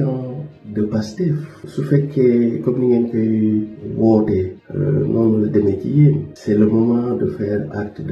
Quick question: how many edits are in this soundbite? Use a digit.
0